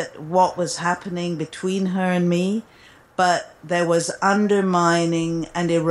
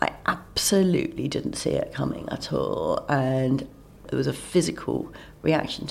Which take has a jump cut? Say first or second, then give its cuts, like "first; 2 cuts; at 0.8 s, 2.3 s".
second; 1 cut; at 4.0 s